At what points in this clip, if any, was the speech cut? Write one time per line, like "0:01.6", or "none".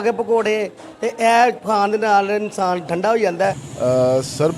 0:03.7